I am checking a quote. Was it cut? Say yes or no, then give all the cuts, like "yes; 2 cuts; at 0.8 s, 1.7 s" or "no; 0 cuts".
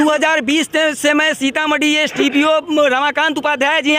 no; 0 cuts